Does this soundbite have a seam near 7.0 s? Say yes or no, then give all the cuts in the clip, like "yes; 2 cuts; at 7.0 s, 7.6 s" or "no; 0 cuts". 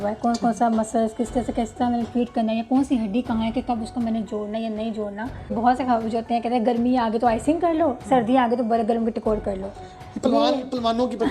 no; 1 cut; at 5.5 s